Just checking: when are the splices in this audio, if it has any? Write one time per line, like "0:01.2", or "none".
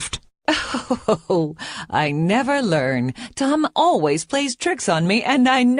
0:01.6